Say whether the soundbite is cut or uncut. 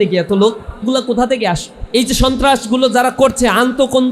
cut